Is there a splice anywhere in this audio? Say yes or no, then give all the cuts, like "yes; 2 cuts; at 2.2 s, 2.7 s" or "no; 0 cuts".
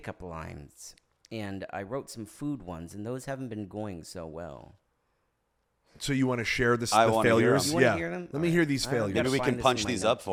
no; 0 cuts